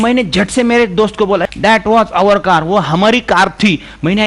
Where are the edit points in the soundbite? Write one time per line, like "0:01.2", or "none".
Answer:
0:01.4